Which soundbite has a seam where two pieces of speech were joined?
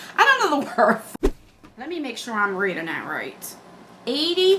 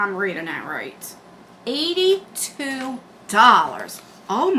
first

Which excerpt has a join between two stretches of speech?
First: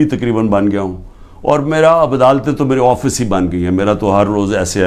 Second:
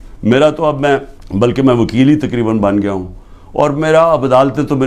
second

